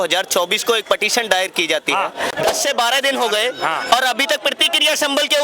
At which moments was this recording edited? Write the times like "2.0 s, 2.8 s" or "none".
2.3 s